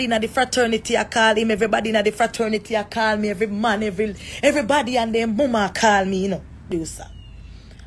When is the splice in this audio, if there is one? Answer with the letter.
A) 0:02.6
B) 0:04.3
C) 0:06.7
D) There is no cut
C